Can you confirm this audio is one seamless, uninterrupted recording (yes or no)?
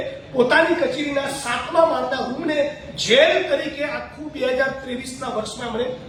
yes